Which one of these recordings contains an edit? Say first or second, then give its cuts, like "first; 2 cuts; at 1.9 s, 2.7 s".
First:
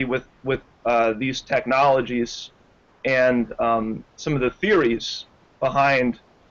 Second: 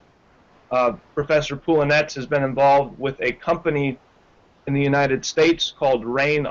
first; 1 cut; at 5.6 s